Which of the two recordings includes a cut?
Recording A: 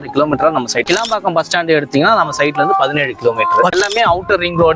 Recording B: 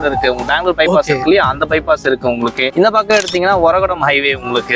A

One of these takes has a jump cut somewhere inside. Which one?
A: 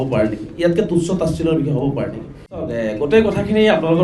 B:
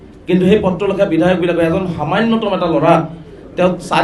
A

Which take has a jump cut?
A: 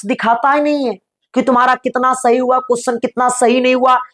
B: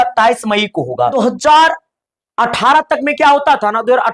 B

